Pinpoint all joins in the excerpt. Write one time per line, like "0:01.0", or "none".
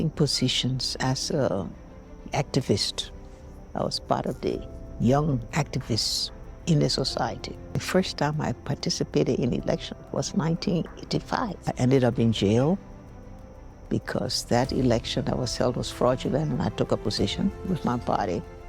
0:07.7
0:11.6